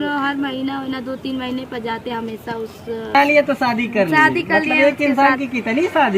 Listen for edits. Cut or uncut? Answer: uncut